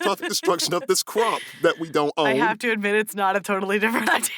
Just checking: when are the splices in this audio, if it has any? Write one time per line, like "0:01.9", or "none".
none